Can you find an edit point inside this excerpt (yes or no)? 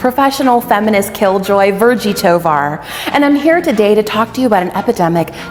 no